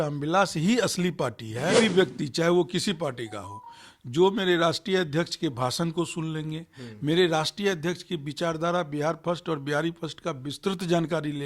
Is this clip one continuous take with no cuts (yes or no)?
no